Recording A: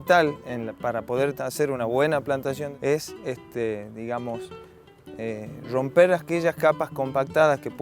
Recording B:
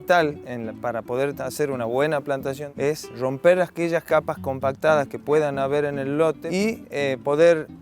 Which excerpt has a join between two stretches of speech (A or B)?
B